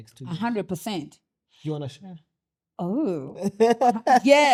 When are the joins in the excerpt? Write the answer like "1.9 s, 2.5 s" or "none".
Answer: none